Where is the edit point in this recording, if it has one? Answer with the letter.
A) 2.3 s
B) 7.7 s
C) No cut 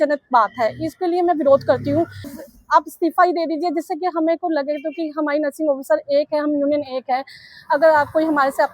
A